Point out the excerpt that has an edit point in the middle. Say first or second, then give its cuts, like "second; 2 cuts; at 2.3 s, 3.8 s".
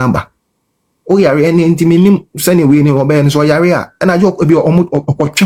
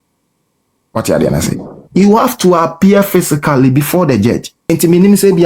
second; 1 cut; at 4.6 s